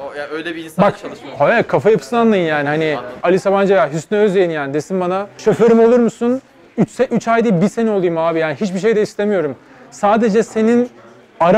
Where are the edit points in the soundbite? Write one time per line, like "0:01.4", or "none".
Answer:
0:03.2
0:05.4